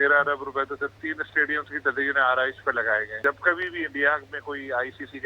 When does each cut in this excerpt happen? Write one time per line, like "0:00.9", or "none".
0:01.0
0:03.1